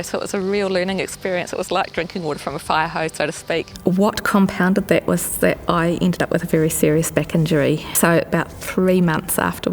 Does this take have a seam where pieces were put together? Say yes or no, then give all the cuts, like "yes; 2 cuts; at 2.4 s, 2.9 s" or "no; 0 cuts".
yes; 2 cuts; at 3.7 s, 7.9 s